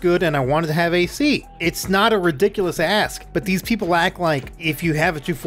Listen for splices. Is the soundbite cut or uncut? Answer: cut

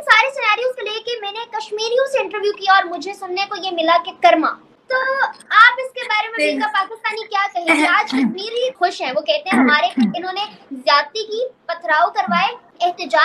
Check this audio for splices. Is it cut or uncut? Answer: uncut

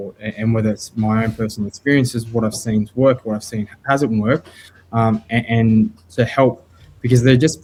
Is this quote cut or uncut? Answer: uncut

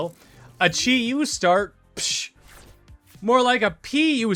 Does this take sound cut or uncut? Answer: uncut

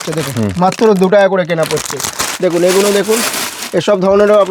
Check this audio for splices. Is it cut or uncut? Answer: uncut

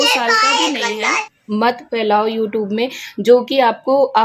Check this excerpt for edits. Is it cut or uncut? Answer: cut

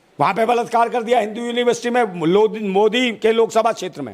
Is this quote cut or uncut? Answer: uncut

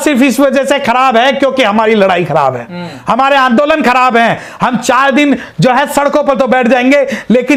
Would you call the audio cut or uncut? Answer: uncut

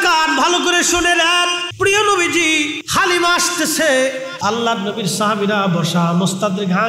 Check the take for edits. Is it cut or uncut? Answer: cut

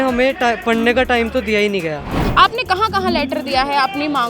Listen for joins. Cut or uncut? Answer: cut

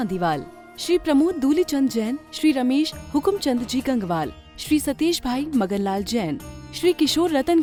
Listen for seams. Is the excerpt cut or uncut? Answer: uncut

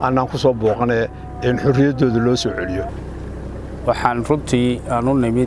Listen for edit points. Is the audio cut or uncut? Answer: uncut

